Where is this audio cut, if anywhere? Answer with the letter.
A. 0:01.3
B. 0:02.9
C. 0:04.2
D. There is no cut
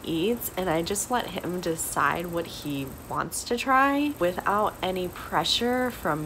C